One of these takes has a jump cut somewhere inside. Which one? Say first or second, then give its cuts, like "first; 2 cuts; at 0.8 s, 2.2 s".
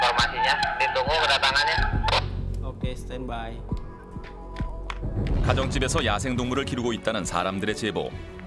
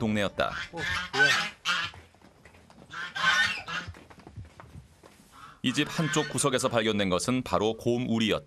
first; 1 cut; at 2.4 s